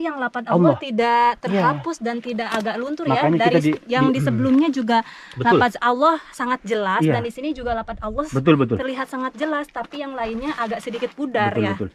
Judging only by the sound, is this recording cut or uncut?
uncut